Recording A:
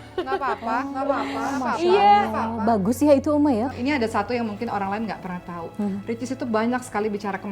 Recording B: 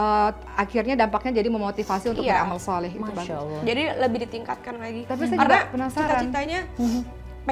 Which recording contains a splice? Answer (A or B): A